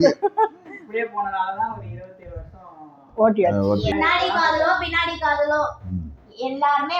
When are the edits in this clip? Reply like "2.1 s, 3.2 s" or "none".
3.9 s